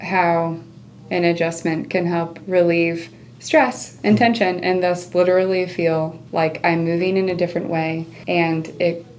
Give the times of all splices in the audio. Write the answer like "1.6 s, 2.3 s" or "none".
8.1 s